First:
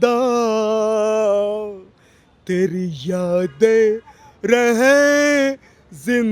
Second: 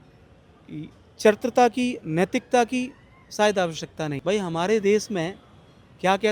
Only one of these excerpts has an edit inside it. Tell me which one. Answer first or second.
second